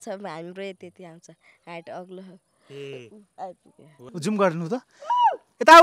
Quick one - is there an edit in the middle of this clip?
yes; 1 cut; at 4.0 s

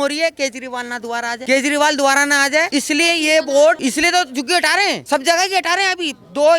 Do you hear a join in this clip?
yes; 4 cuts; at 1.4 s, 2.7 s, 3.8 s, 5.0 s

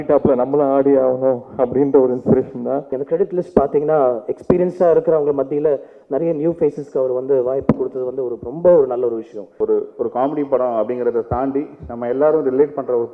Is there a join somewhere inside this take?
yes; 2 cuts; at 2.9 s, 9.5 s

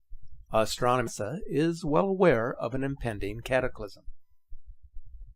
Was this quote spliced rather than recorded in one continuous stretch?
no; 0 cuts

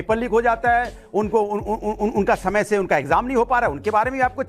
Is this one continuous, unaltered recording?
no; 1 cut; at 1.0 s

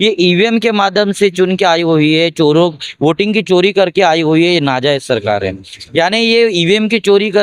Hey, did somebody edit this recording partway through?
no; 0 cuts

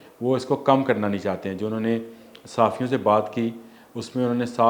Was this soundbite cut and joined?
no; 0 cuts

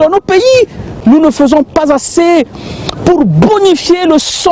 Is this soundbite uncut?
no; 1 cut; at 0.9 s

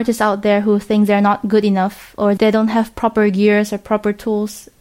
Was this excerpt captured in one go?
yes; 0 cuts

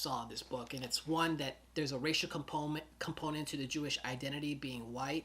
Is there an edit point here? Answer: yes; 1 cut; at 1.6 s

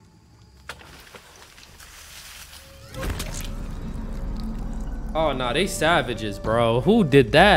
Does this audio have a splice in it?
no; 0 cuts

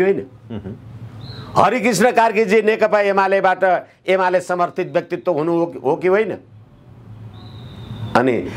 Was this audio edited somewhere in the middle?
no; 0 cuts

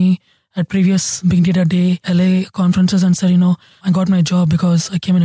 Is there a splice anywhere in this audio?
yes; 3 cuts; at 1.2 s, 2.0 s, 3.8 s

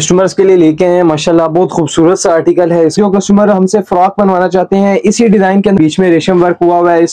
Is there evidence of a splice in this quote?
yes; 2 cuts; at 3.0 s, 5.8 s

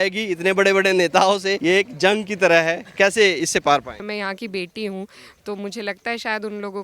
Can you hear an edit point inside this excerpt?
yes; 2 cuts; at 1.5 s, 4.0 s

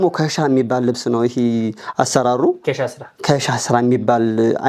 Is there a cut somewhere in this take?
no; 0 cuts

